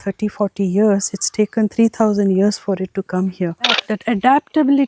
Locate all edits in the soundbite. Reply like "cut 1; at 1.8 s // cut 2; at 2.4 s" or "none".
cut 1; at 3.9 s